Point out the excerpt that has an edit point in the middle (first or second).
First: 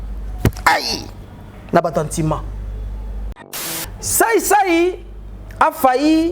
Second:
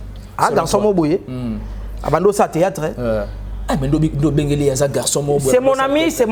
first